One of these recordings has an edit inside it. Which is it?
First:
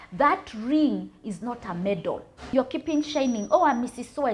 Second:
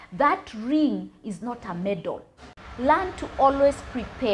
second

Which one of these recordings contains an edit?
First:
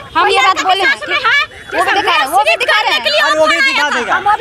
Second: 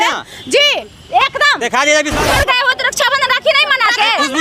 second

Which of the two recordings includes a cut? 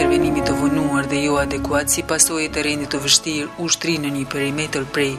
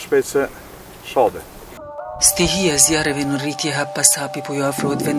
second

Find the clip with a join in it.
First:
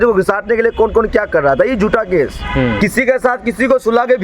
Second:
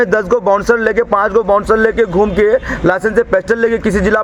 first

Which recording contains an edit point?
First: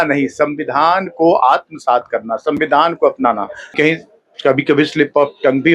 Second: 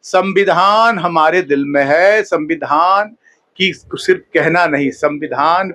first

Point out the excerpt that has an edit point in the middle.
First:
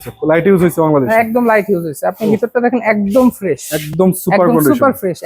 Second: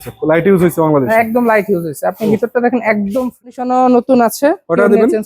second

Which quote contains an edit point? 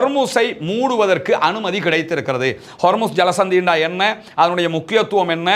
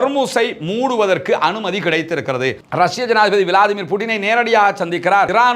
second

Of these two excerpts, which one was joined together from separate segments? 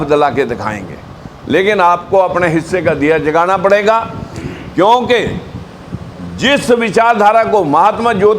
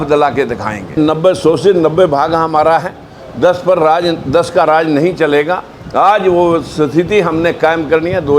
second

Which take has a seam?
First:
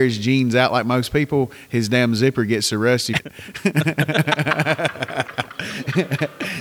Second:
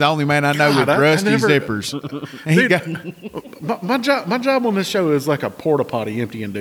first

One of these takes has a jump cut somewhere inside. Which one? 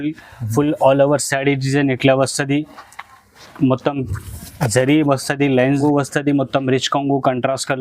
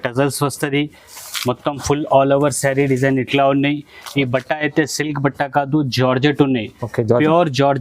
first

